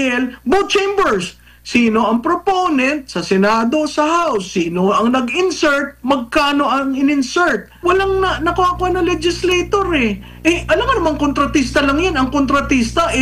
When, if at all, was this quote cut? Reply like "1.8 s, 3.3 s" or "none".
7.7 s